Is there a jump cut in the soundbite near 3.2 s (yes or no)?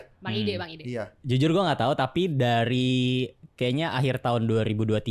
no